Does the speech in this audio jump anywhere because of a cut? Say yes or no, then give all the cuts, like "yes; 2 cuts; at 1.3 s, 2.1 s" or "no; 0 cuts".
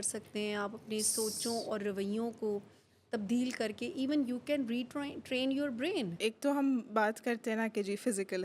yes; 1 cut; at 6.2 s